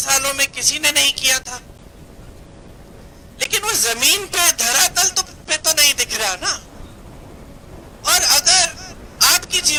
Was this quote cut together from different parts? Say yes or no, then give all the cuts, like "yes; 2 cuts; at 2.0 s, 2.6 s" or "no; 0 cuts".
no; 0 cuts